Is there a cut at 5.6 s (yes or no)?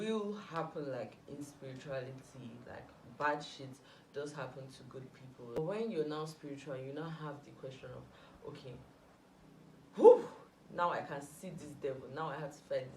yes